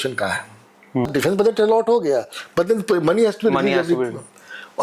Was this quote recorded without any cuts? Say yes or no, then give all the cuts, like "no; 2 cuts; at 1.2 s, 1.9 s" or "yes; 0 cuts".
no; 1 cut; at 1.1 s